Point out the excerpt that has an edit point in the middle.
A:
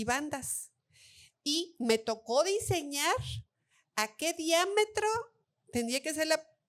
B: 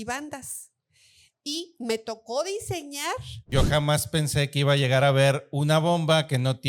B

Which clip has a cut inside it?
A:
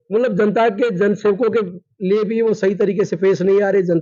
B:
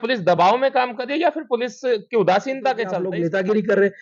B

